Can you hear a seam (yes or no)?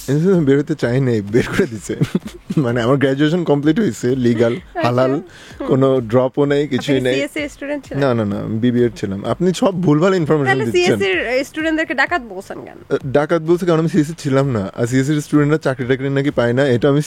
no